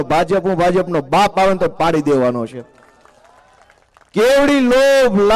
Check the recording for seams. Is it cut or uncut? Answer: uncut